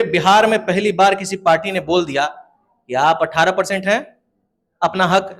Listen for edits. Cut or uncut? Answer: uncut